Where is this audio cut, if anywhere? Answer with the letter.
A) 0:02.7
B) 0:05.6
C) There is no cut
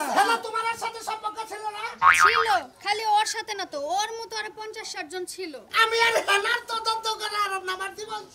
B